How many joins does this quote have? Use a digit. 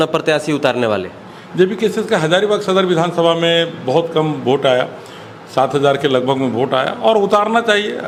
0